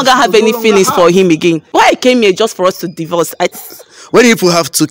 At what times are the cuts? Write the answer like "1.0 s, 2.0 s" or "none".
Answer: 1.7 s, 3.6 s